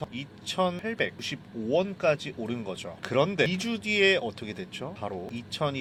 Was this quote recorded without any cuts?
yes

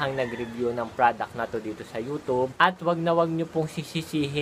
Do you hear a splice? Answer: yes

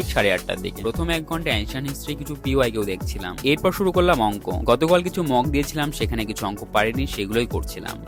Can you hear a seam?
no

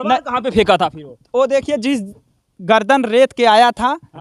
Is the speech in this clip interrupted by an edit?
no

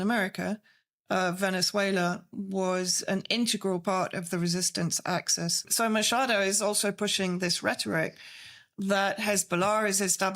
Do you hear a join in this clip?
yes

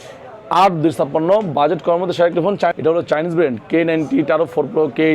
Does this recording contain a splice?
yes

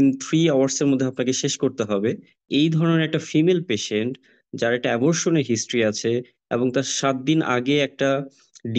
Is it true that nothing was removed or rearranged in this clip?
no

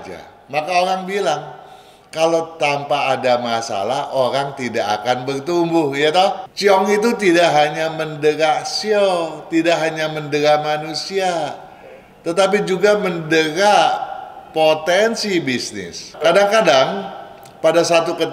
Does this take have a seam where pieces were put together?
yes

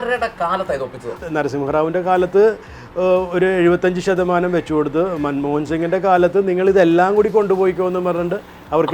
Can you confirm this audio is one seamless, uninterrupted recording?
no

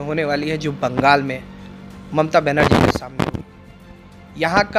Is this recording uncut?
yes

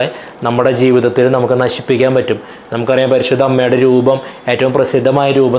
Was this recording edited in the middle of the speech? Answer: no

